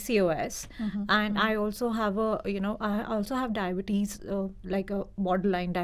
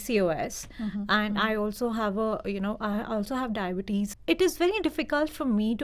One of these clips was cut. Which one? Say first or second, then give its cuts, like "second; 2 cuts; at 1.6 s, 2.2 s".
second; 1 cut; at 4.2 s